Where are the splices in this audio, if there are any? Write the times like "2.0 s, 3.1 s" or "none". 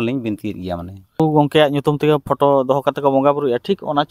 1.2 s